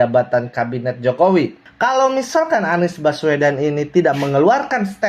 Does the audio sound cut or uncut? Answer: cut